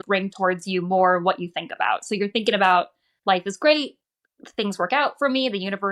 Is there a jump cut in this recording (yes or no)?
no